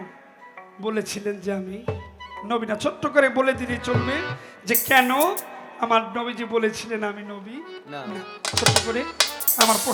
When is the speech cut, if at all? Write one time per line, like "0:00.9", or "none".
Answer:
none